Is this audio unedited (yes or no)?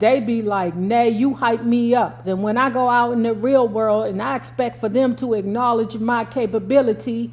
no